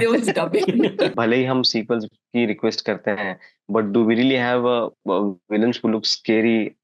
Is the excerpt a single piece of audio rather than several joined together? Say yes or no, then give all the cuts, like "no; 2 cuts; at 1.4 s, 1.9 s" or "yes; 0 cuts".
no; 1 cut; at 1.1 s